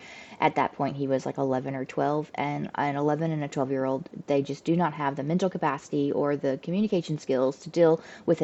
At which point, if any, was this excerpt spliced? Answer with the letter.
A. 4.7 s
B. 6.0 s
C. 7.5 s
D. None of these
D